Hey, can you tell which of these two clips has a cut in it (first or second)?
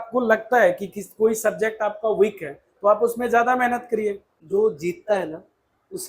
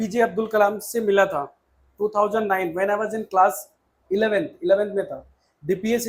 first